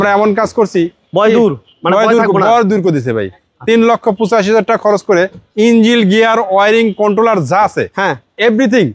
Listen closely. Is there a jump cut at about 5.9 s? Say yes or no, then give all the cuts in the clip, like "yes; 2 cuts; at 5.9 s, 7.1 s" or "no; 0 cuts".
no; 0 cuts